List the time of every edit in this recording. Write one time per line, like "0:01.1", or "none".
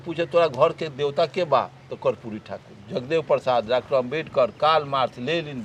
none